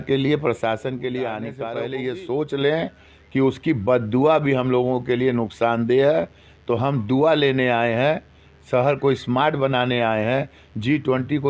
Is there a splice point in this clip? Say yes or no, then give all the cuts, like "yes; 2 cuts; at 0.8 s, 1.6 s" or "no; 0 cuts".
yes; 1 cut; at 1.6 s